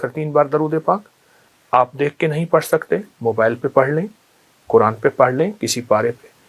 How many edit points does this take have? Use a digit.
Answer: 0